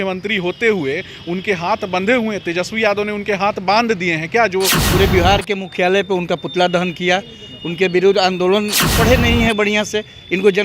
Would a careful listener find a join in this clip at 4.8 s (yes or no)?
yes